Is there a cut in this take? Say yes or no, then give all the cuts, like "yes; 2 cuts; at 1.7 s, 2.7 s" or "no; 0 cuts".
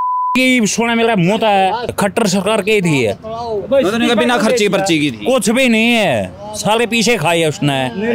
yes; 1 cut; at 1.9 s